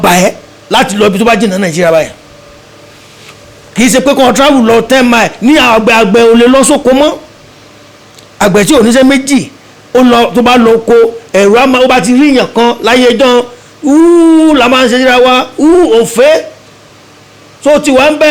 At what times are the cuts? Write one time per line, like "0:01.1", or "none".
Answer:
none